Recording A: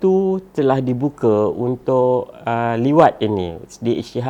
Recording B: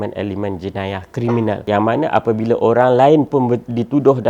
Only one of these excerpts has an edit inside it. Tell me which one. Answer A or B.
B